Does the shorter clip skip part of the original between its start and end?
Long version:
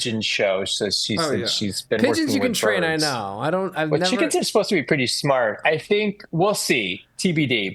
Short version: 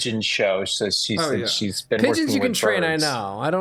no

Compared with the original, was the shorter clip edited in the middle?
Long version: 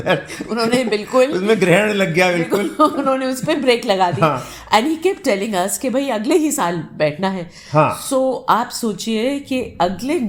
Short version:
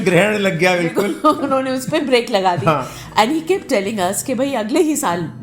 no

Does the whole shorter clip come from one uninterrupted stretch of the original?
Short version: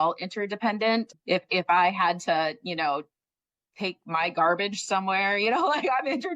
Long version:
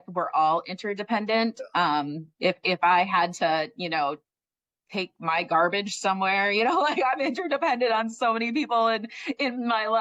no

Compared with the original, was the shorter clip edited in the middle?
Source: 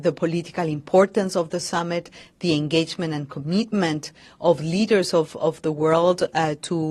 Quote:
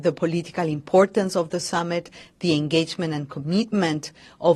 no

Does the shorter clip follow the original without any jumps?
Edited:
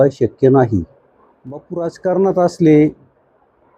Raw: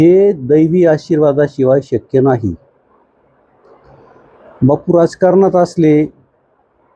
no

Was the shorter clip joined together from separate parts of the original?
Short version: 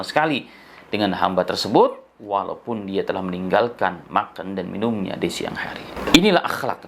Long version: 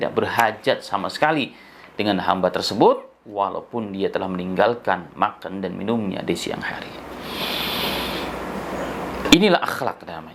yes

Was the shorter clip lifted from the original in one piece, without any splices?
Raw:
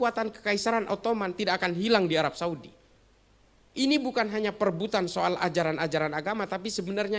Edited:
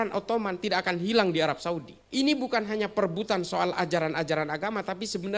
no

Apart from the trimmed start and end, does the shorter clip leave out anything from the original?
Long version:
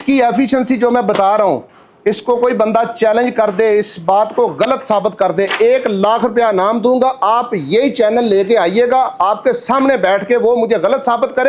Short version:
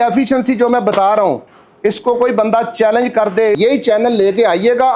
yes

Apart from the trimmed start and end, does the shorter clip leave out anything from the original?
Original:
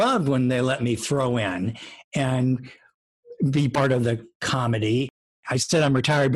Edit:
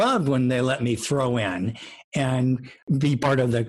yes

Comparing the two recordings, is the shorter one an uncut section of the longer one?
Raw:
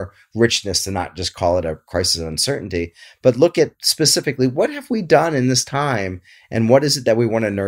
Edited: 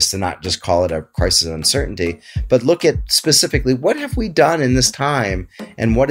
yes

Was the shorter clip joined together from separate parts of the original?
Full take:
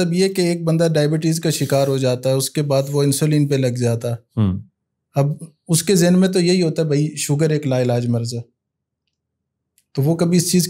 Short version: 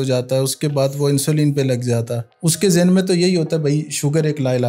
yes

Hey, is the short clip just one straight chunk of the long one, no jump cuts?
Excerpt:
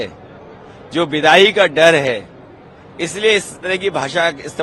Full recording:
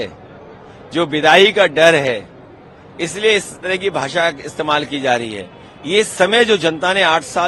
yes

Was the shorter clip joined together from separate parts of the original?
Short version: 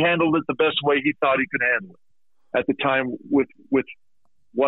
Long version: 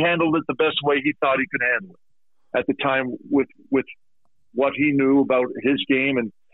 no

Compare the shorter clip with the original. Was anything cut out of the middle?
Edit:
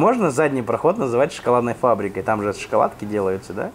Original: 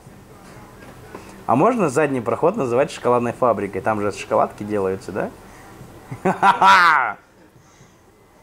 no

